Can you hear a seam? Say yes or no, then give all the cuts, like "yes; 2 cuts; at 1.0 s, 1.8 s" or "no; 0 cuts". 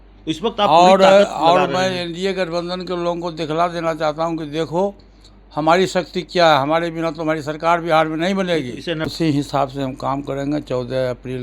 yes; 1 cut; at 9.1 s